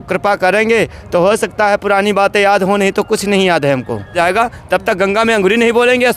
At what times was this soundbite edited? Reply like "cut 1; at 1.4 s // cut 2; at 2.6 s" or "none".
cut 1; at 4.1 s